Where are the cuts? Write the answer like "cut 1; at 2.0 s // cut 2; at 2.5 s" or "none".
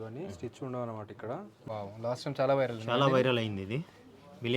cut 1; at 1.5 s